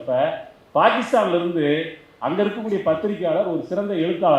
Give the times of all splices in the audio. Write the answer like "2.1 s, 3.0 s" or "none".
none